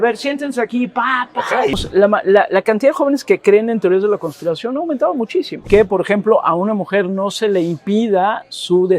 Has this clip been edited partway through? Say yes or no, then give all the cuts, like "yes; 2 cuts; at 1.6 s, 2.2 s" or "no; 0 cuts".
yes; 2 cuts; at 1.7 s, 5.6 s